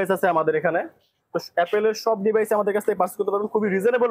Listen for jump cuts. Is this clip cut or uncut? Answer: uncut